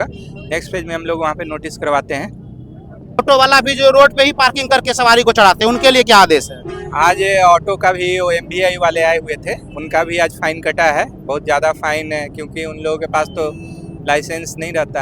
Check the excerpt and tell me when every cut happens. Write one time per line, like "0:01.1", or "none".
0:03.2